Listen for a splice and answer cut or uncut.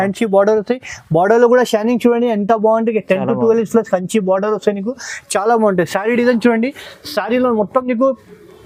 uncut